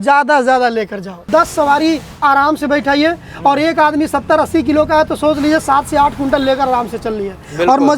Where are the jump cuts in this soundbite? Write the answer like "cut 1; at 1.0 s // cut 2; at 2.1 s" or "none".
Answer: cut 1; at 1.3 s